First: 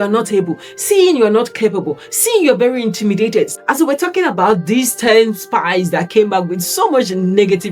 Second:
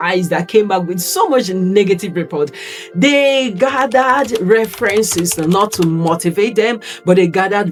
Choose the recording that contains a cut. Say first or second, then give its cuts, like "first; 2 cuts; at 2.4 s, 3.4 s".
first; 1 cut; at 3.5 s